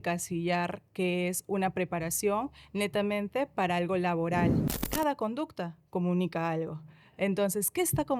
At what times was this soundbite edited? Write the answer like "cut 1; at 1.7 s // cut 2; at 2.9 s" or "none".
cut 1; at 4.8 s